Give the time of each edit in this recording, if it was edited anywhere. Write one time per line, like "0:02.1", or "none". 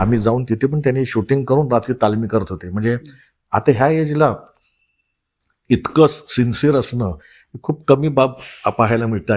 none